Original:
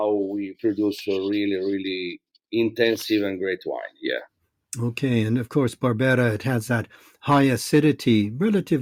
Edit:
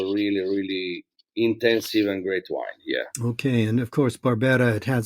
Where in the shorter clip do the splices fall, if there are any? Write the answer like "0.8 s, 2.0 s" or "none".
3.1 s